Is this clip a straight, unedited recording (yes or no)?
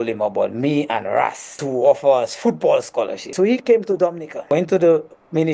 no